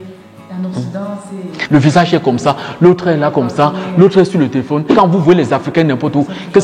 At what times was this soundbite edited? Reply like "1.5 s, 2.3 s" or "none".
1.6 s, 4.9 s